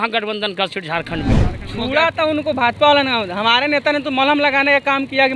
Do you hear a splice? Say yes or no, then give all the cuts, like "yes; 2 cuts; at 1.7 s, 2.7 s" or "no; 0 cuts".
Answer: yes; 1 cut; at 1.5 s